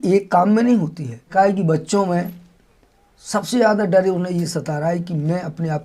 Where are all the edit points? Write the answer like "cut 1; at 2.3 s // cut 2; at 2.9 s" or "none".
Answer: cut 1; at 1.3 s